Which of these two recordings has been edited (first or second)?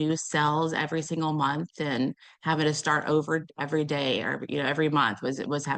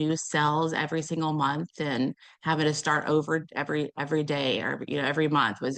first